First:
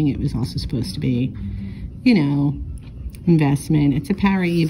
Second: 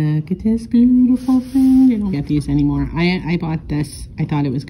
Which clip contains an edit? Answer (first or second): second